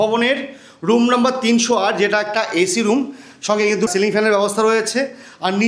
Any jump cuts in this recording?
yes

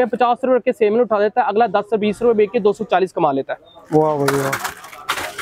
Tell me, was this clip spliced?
no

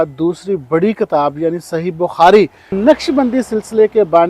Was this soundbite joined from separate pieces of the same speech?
yes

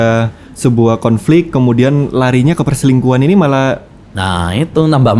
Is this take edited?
no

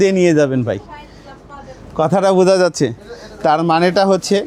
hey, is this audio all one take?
yes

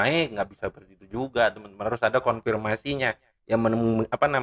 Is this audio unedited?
yes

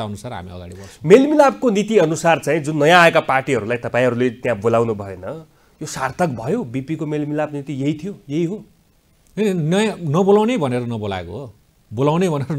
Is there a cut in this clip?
no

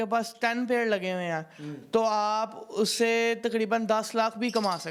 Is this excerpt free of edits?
yes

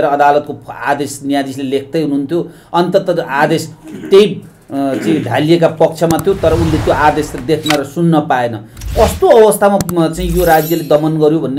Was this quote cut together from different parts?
no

